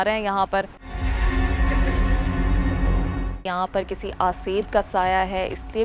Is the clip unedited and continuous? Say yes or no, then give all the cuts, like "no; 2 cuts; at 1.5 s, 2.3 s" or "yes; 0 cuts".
no; 1 cut; at 3.4 s